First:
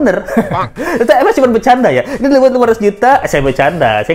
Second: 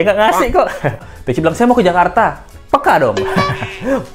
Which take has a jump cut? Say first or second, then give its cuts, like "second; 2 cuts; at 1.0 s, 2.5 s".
second; 1 cut; at 1.1 s